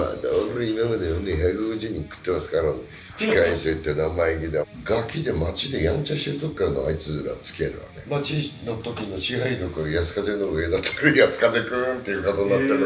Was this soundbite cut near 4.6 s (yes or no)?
yes